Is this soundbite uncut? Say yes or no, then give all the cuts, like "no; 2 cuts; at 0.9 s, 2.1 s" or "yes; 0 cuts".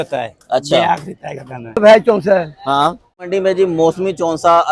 no; 2 cuts; at 1.7 s, 3.3 s